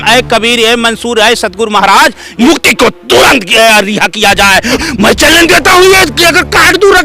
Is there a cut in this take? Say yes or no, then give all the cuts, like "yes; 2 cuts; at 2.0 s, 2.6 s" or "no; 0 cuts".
yes; 2 cuts; at 2.3 s, 4.8 s